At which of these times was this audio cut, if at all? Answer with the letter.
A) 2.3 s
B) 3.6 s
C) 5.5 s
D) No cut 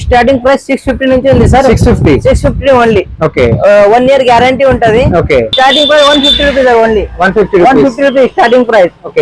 C